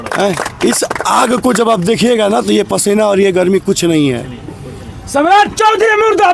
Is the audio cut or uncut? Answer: uncut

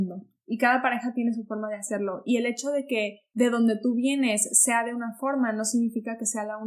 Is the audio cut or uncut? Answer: uncut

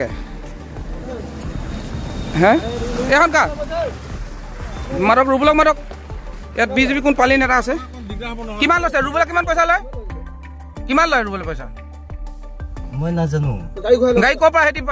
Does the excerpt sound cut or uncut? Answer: uncut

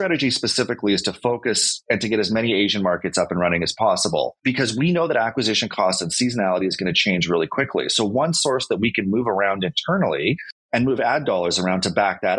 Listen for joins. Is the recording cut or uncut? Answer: uncut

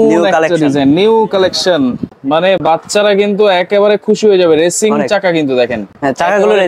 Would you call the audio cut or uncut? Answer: uncut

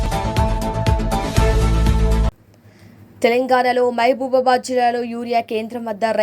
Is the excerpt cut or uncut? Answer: cut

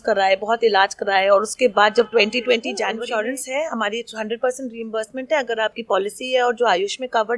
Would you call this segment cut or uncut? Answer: cut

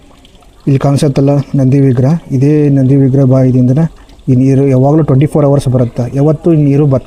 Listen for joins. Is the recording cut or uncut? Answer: uncut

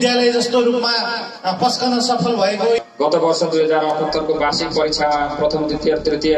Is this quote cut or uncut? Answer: cut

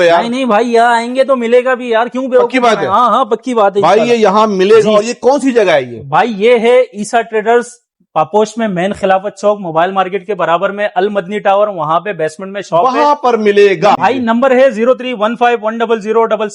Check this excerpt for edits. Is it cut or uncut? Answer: uncut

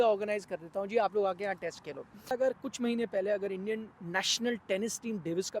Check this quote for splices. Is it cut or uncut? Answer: cut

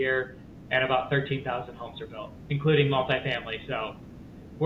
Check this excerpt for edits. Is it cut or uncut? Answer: uncut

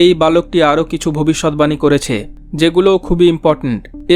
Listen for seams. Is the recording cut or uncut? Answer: uncut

